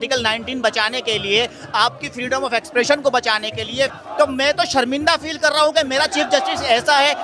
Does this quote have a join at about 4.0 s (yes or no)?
yes